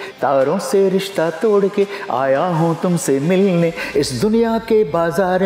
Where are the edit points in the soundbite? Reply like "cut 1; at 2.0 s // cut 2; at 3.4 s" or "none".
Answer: none